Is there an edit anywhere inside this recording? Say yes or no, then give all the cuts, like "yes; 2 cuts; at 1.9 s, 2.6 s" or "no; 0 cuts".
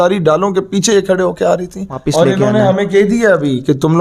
yes; 1 cut; at 2.0 s